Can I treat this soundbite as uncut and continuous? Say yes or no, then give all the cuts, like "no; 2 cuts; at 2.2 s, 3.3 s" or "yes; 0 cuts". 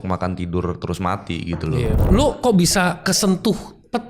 no; 1 cut; at 2.0 s